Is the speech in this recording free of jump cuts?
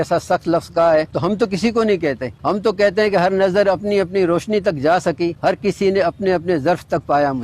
no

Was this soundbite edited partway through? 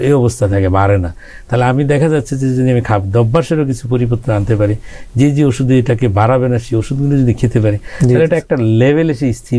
no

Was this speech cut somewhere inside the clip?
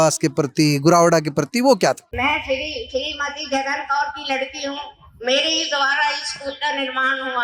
yes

